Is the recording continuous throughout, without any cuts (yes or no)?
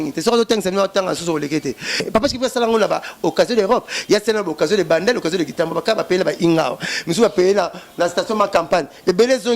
no